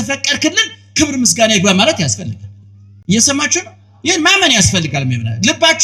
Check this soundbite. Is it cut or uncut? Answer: uncut